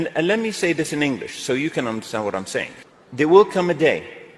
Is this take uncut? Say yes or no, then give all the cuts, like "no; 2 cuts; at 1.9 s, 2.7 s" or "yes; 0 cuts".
no; 1 cut; at 3.3 s